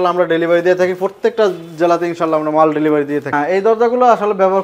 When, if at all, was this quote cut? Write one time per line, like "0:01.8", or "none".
0:03.3